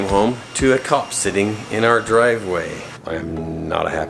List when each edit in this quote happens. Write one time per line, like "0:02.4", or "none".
0:03.0